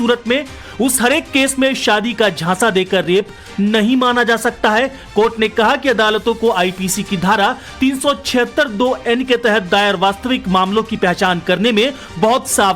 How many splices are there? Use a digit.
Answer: 1